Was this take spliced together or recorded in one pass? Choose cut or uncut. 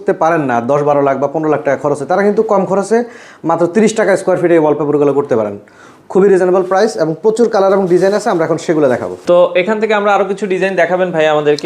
uncut